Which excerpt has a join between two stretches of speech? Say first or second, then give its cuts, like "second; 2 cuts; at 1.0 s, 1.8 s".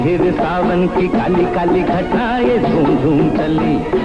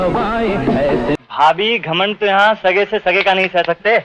second; 1 cut; at 1.3 s